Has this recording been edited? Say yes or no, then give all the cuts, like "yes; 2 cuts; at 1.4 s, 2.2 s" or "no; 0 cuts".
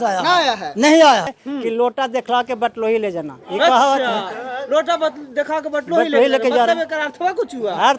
yes; 1 cut; at 1.3 s